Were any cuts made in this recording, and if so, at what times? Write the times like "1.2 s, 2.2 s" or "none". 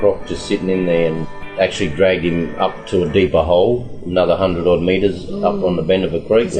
1.2 s